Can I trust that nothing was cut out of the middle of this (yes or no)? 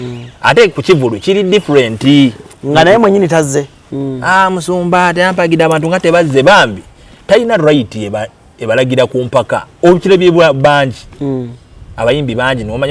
no